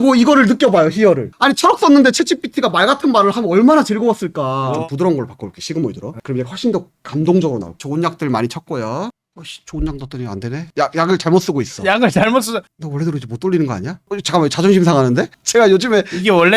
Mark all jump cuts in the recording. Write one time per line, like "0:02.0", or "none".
0:07.8
0:12.7